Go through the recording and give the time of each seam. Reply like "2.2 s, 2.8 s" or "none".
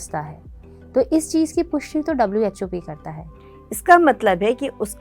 3.1 s

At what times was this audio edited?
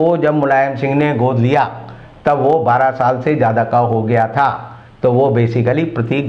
none

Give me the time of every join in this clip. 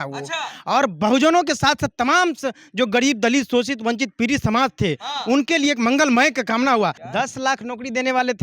7.0 s

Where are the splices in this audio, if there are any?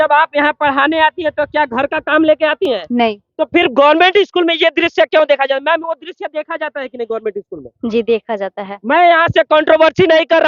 none

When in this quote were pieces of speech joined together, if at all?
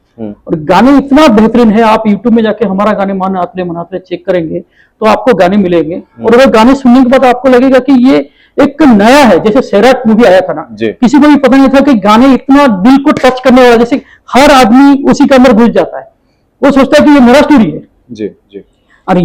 none

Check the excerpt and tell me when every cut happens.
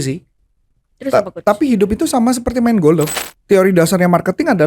3.2 s

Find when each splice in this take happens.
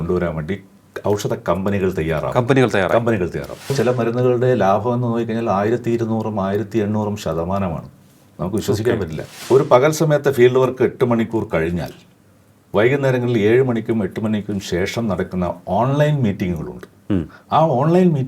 3.7 s, 9.3 s

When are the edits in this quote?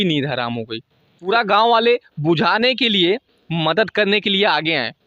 1.3 s

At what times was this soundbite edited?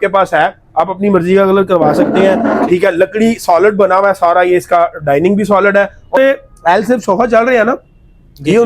6.2 s

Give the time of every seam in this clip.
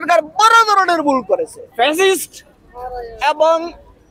1.6 s

